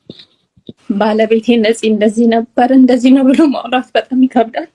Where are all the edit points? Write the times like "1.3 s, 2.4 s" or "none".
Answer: none